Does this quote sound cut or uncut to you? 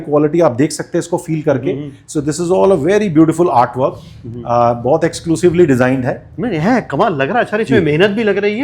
uncut